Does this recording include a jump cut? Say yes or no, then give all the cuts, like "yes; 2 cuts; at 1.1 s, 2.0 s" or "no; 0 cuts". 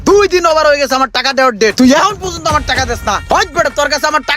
yes; 1 cut; at 3.2 s